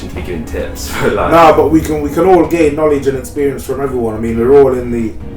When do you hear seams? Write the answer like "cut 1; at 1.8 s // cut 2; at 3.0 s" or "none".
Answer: none